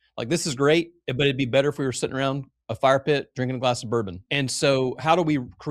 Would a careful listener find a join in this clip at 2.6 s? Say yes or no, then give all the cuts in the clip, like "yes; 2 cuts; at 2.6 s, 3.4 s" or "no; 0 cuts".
no; 1 cut; at 4.2 s